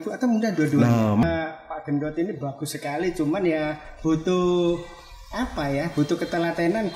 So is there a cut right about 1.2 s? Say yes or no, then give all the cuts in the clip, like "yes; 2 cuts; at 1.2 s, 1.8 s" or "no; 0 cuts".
yes; 1 cut; at 1.2 s